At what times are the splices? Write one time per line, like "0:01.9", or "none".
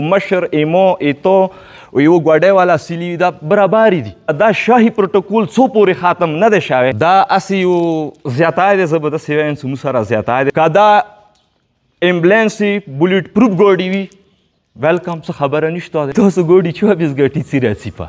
0:04.3
0:07.0
0:10.5
0:16.1